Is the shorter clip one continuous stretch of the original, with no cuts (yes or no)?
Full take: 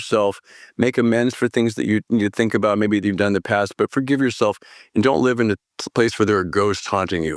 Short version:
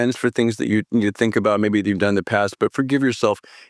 yes